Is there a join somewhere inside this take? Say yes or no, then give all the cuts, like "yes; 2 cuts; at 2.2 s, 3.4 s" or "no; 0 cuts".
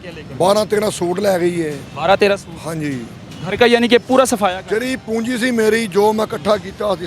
no; 0 cuts